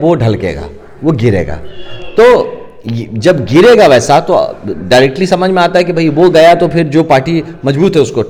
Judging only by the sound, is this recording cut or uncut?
uncut